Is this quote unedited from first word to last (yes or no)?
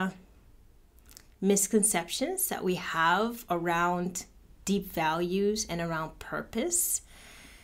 yes